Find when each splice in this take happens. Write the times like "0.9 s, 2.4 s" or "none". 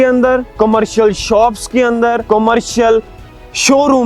2.2 s